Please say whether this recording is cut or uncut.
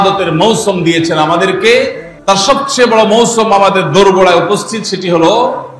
uncut